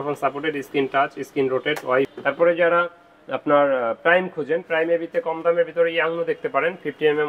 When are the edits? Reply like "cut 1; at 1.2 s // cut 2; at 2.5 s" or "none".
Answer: cut 1; at 2.1 s

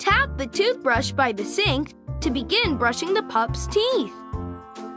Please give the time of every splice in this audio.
cut 1; at 4.0 s

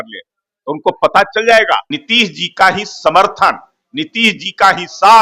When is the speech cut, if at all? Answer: cut 1; at 2.0 s

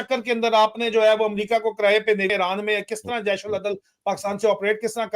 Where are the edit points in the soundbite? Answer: cut 1; at 2.3 s

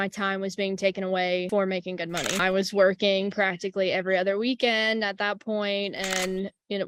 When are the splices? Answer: none

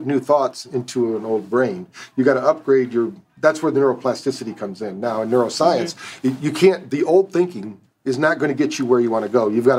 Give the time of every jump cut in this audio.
none

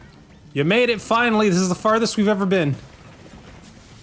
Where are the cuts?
none

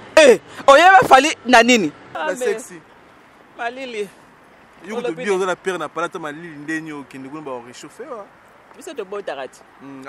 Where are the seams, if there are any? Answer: cut 1; at 2.1 s

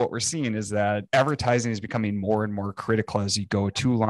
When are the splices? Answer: cut 1; at 1.0 s

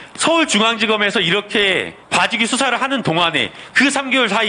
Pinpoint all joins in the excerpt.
cut 1; at 2.0 s

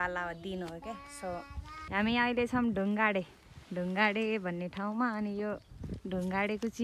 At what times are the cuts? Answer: cut 1; at 1.9 s

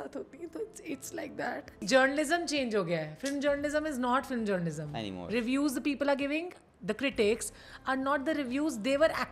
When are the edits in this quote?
cut 1; at 1.8 s

